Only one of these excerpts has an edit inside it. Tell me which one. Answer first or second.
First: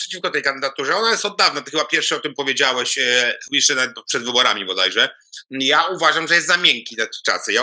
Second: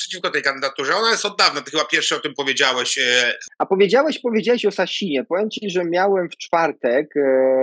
second